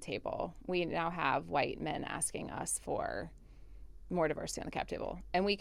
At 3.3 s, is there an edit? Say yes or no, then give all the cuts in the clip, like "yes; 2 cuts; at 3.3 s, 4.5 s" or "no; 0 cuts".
no; 0 cuts